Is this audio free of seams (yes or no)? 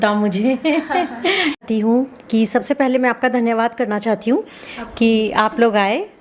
no